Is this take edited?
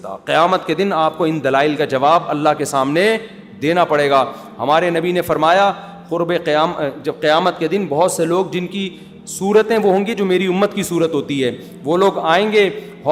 no; 0 cuts

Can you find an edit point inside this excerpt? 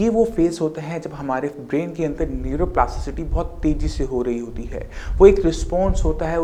no; 0 cuts

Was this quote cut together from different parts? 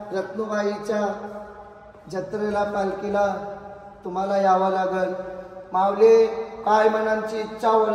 no; 0 cuts

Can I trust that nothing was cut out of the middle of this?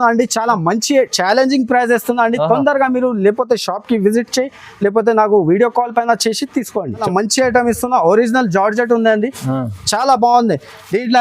no; 1 cut; at 7.0 s

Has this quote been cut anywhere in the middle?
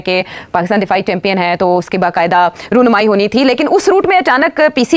no; 0 cuts

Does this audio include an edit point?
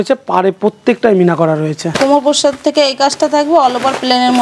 yes; 1 cut; at 1.9 s

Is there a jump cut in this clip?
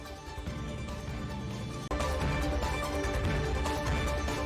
no; 0 cuts

